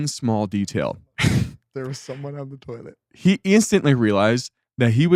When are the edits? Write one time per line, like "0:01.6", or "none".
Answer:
none